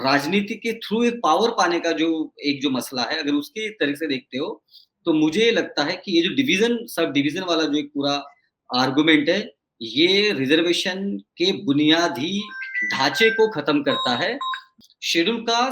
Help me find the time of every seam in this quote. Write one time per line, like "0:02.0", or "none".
0:14.7